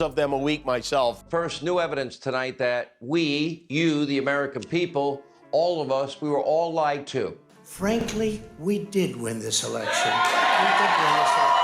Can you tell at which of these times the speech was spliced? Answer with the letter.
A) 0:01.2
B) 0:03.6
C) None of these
C